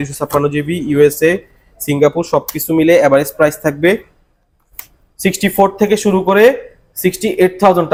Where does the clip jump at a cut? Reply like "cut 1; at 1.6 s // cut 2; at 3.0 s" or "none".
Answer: none